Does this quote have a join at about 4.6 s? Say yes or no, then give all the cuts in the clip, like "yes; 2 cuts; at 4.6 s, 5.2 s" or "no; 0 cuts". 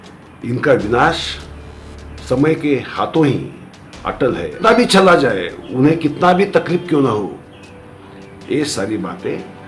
yes; 1 cut; at 4.6 s